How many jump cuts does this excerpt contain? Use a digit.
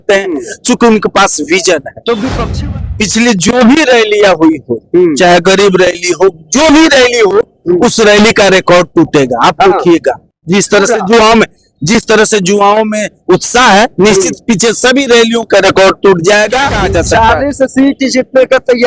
2